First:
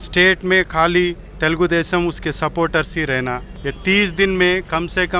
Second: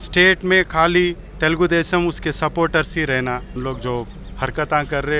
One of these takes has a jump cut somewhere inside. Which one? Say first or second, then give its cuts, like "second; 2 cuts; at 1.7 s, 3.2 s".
first; 1 cut; at 3.5 s